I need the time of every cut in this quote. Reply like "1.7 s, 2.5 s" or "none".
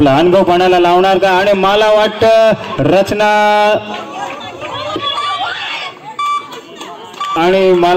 none